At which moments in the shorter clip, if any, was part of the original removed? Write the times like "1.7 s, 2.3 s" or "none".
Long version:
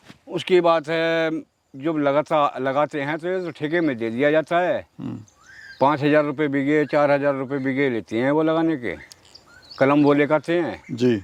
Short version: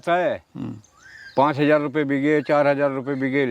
none